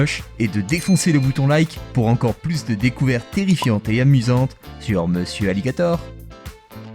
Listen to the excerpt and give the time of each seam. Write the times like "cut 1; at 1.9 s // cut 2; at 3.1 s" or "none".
cut 1; at 6.0 s